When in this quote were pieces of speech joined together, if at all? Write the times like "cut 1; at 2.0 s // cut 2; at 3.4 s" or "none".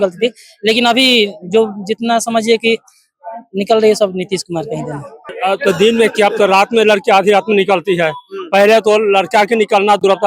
cut 1; at 5.3 s